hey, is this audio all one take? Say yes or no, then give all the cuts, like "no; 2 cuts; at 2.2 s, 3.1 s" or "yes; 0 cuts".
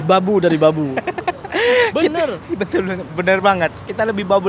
yes; 0 cuts